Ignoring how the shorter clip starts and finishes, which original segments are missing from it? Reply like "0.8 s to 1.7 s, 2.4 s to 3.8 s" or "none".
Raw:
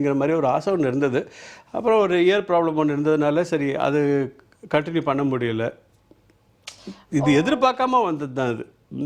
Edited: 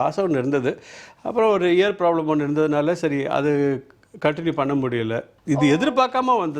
5.8 s to 7.0 s